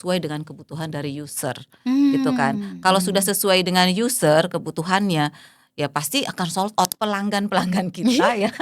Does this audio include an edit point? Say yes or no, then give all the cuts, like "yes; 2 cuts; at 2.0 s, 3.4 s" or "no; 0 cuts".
yes; 1 cut; at 6.9 s